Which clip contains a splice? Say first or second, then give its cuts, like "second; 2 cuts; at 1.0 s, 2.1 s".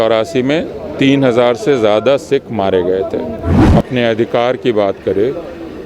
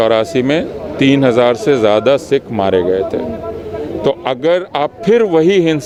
first; 1 cut; at 3.6 s